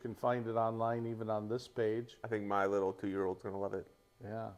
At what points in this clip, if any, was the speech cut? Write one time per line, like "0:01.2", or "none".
0:02.2